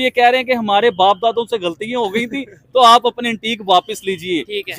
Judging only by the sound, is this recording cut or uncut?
uncut